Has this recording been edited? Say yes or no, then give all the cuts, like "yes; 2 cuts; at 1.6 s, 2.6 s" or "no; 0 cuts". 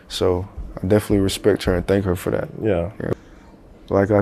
yes; 1 cut; at 3.1 s